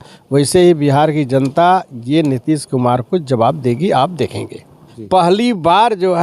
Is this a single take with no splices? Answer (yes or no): no